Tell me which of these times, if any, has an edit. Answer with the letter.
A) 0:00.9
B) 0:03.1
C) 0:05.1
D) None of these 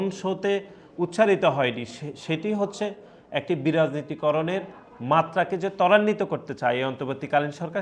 D